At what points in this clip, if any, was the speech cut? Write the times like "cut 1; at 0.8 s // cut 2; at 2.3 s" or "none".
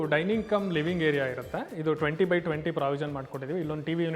none